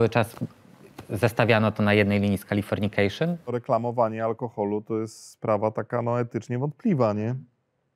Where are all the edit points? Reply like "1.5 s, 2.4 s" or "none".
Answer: 3.6 s